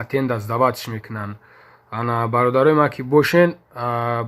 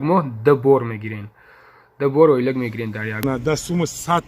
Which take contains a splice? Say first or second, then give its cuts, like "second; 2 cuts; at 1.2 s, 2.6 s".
second; 1 cut; at 3.2 s